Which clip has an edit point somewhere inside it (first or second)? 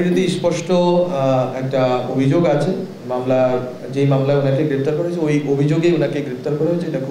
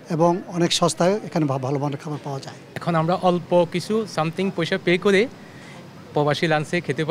second